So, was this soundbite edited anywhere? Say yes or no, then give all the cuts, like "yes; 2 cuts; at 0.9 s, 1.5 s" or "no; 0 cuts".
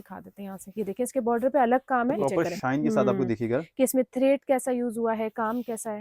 yes; 1 cut; at 2.3 s